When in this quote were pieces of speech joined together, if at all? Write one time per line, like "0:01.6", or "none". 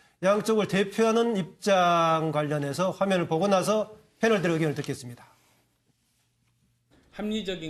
0:04.6